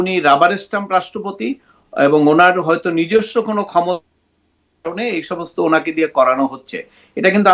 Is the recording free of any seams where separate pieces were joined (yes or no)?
yes